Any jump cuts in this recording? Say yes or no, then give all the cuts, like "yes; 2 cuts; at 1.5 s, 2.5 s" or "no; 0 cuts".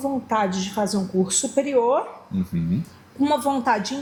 no; 0 cuts